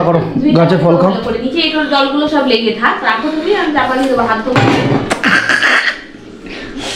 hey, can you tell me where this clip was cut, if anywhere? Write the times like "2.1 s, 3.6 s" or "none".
none